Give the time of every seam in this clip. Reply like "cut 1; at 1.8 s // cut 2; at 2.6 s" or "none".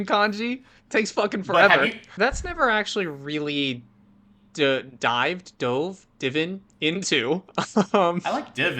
cut 1; at 2.0 s